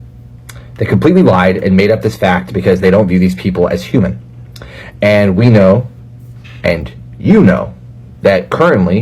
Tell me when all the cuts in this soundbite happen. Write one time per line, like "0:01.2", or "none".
0:05.4